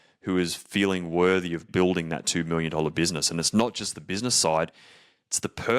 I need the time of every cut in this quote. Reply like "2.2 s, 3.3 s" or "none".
1.7 s